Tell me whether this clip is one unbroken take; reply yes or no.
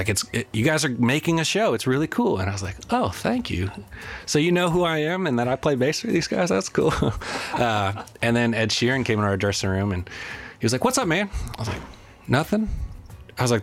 yes